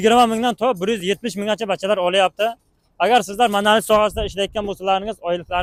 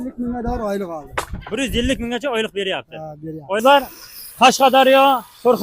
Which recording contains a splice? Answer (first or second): second